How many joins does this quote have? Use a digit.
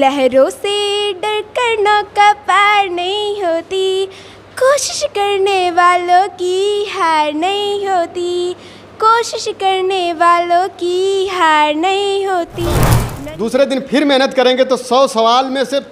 1